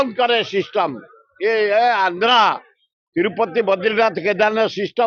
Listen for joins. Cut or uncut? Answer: uncut